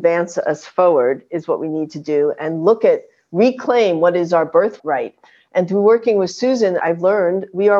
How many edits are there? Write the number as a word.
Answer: two